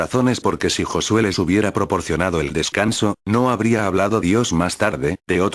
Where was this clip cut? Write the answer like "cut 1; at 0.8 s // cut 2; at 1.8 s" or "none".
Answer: cut 1; at 1.2 s